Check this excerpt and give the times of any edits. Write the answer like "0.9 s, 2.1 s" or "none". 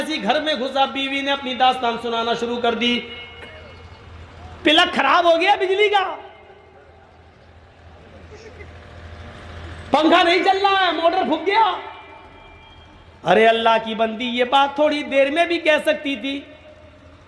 none